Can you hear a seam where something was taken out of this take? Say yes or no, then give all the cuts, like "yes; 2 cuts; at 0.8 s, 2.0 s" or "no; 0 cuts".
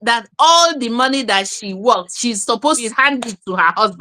yes; 1 cut; at 2.9 s